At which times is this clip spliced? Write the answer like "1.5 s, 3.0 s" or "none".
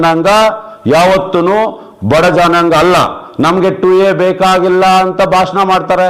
none